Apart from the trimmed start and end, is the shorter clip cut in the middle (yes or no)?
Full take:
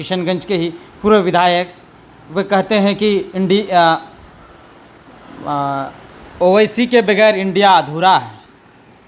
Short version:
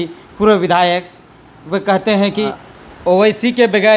yes